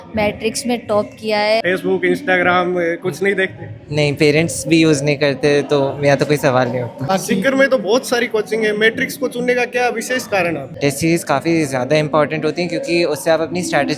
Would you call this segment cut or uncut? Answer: cut